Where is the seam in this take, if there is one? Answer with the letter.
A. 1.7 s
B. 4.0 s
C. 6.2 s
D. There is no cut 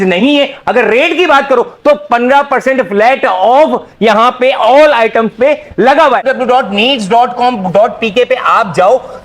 C